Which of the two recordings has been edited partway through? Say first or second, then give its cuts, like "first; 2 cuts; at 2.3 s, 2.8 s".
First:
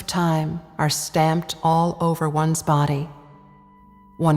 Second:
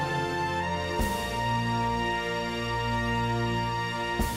first; 1 cut; at 2.8 s